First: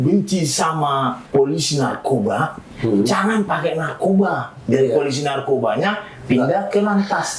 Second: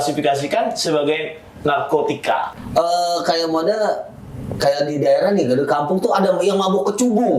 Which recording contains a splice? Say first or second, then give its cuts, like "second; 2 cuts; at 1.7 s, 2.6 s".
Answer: second; 1 cut; at 2.5 s